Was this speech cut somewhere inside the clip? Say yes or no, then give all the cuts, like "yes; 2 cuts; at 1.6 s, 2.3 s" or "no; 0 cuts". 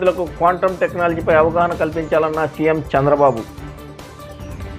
no; 0 cuts